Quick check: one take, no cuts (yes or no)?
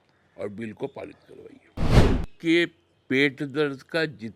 no